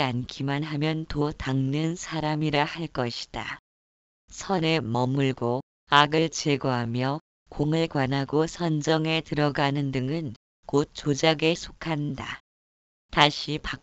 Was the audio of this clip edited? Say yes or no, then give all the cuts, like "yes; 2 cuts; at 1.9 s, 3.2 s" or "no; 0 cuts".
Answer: no; 0 cuts